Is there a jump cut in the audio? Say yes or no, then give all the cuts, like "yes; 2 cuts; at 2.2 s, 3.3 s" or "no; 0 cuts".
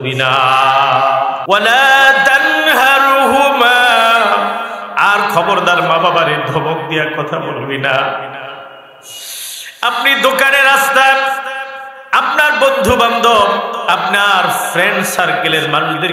yes; 1 cut; at 1.4 s